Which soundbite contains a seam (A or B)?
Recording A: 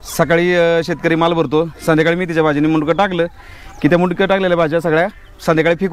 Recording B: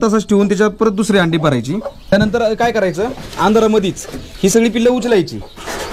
B